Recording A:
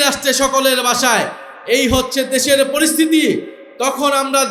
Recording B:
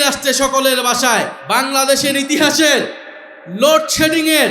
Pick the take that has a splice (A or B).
B